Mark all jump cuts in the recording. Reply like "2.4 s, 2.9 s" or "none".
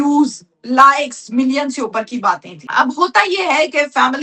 none